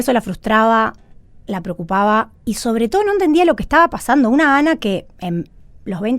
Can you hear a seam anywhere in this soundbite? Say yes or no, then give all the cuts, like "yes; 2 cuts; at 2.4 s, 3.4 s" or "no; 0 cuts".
yes; 1 cut; at 2.3 s